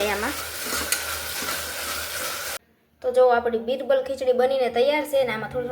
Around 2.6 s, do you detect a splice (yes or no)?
yes